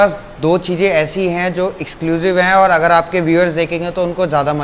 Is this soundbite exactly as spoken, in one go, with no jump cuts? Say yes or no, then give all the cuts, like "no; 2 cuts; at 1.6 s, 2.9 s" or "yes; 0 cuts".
yes; 0 cuts